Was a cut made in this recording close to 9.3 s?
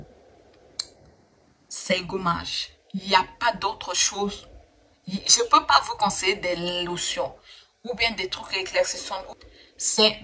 yes; 1 cut; at 9.3 s

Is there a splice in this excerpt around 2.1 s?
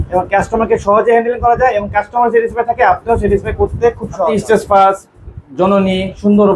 no; 1 cut; at 4.3 s

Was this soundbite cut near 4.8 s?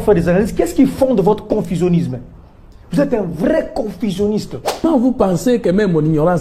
yes; 1 cut; at 4.8 s

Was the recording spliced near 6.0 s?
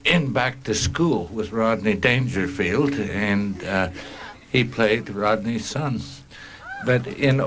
no; 1 cut; at 2.0 s

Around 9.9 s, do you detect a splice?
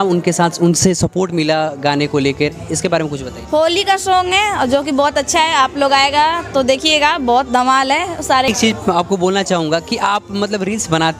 no; 1 cut; at 8.5 s

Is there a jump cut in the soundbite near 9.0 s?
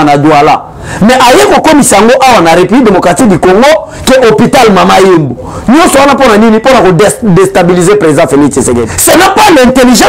yes; 1 cut; at 9.0 s

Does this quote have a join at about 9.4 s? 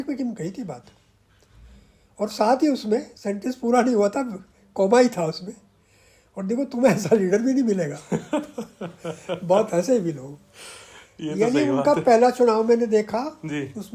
no; 0 cuts

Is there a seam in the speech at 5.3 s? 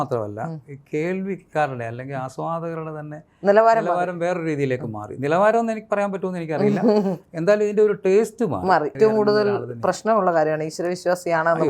no; 1 cut; at 9.0 s

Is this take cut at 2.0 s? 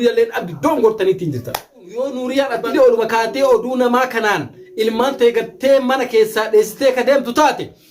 yes; 1 cut; at 2.0 s

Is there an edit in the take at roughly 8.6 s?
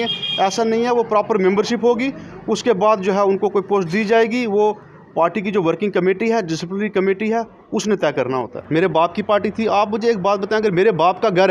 yes; 1 cut; at 8.6 s

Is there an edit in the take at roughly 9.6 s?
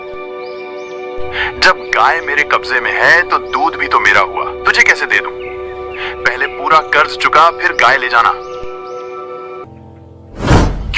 yes; 1 cut; at 9.6 s

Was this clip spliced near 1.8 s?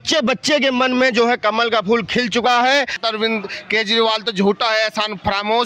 no; 1 cut; at 3.0 s

